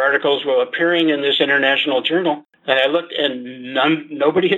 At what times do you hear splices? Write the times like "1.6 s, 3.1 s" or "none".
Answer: 2.5 s